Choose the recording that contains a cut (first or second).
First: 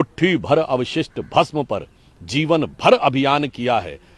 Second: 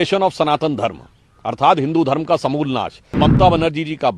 second